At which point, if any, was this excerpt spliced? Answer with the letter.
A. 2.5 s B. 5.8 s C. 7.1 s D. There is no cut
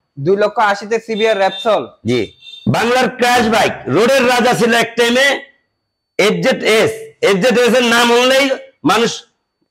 A